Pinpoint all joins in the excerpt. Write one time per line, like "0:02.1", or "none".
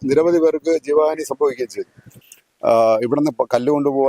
0:02.2